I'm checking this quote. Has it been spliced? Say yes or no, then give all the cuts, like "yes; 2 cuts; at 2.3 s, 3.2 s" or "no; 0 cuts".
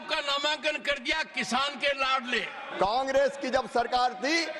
yes; 1 cut; at 2.6 s